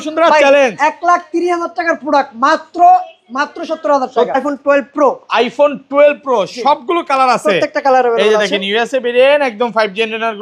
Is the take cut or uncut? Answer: cut